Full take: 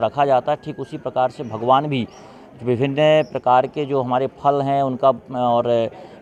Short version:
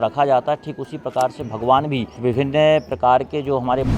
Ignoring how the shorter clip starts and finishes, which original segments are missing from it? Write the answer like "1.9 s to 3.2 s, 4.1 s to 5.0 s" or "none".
2.1 s to 2.5 s